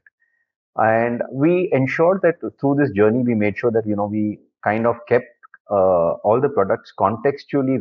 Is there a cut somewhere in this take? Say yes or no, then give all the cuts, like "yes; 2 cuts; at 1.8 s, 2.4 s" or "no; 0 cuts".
no; 0 cuts